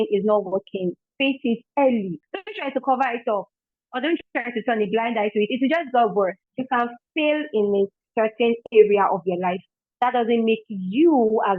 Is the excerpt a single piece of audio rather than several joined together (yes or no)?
no